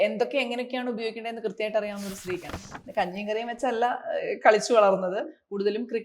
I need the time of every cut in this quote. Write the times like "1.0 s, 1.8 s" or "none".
2.6 s